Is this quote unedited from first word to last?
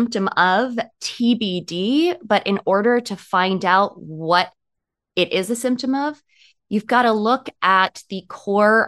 yes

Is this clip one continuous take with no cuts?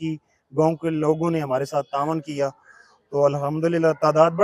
yes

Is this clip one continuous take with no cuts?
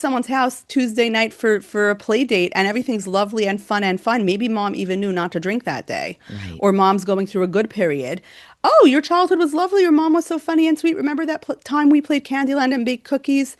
yes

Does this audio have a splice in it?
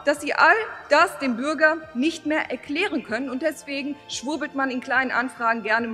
no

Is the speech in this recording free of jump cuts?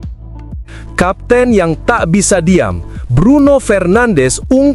no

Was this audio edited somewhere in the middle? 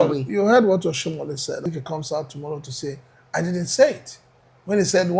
yes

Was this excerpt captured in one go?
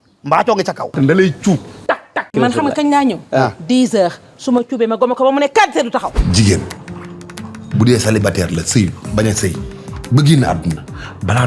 no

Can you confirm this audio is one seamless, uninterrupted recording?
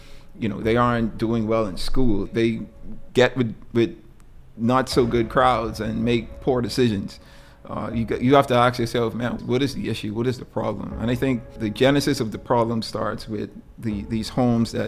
no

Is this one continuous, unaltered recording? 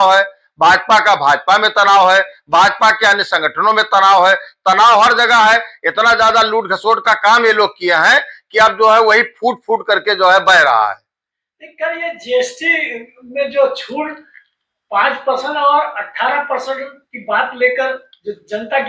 yes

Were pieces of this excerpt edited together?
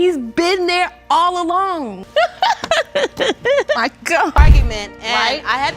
yes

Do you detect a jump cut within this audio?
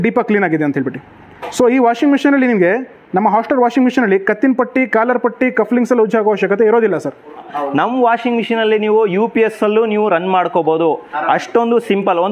yes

